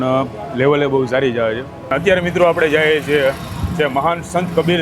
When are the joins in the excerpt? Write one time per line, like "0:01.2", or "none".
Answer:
0:01.9